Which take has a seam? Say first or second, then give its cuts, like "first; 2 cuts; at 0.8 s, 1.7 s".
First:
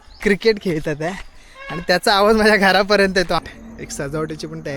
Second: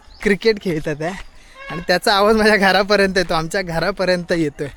first; 1 cut; at 3.4 s